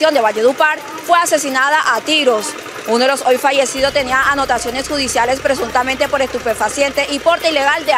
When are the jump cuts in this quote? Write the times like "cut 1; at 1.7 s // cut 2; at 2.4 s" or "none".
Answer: none